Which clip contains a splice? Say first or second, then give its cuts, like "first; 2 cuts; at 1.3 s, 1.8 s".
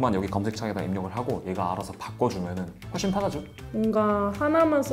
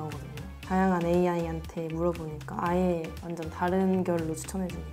first; 1 cut; at 3.5 s